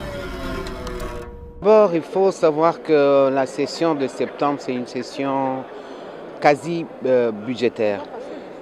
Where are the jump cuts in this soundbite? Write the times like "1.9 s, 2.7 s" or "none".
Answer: none